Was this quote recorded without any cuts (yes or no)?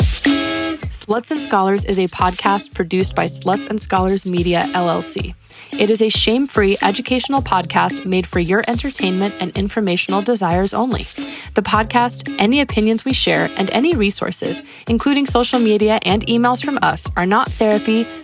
no